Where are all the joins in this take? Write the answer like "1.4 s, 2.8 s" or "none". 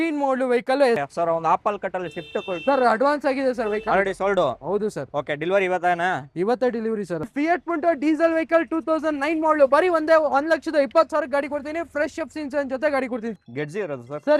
1.0 s, 7.2 s, 13.4 s